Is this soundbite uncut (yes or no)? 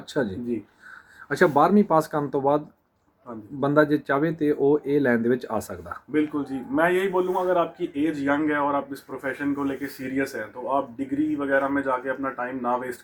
yes